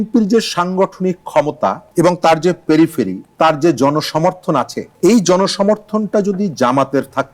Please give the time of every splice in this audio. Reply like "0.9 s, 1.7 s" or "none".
none